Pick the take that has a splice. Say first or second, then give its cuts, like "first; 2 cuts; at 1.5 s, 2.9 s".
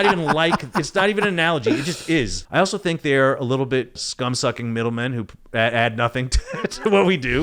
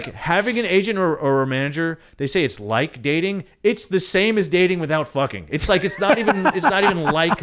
first; 2 cuts; at 2.4 s, 4.0 s